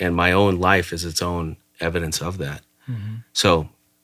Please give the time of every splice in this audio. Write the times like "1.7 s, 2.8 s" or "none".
none